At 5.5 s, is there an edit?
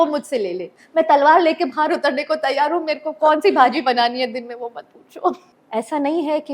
yes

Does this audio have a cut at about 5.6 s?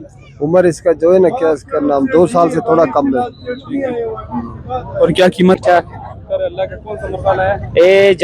yes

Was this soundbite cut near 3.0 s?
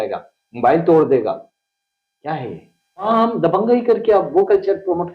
yes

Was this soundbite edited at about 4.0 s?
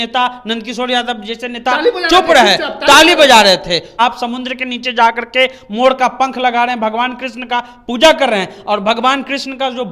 yes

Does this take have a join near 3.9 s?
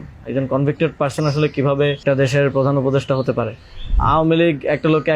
yes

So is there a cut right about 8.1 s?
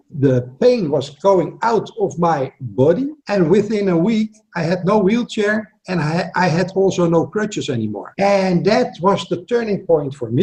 no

